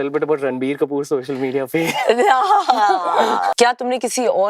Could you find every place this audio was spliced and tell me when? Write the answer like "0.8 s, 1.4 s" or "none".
3.5 s